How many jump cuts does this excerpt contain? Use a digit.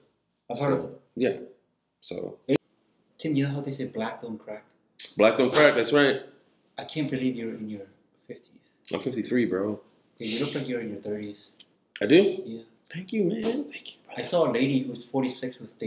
1